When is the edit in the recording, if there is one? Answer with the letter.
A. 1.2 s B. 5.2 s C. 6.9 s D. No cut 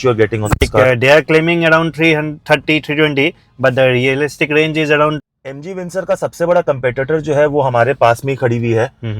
B